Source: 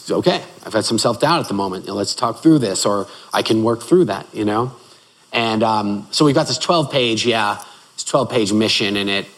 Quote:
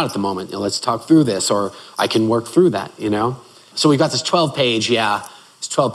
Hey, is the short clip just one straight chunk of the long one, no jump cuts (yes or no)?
no